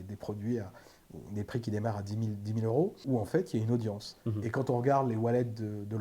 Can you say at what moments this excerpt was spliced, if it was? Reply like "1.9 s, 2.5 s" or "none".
3.0 s